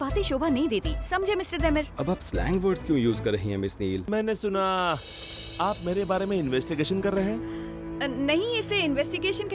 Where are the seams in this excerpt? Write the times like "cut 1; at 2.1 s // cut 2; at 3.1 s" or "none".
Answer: cut 1; at 4.0 s